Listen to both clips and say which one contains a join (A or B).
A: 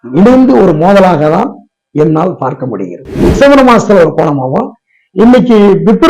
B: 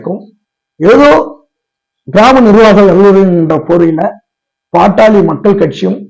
A